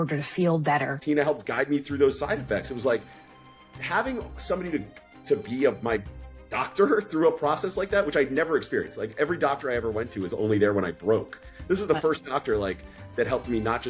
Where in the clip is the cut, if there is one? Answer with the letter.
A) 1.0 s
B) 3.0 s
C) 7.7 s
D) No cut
A